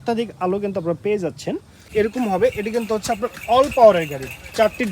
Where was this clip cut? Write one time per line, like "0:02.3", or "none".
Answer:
0:01.9